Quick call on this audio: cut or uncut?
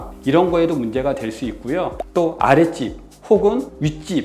uncut